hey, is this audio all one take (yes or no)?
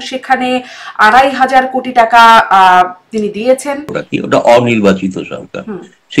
no